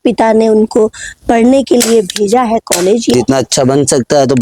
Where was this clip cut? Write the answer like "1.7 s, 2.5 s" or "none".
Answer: 3.1 s